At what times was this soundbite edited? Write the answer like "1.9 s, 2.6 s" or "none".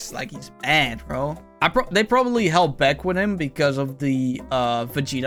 none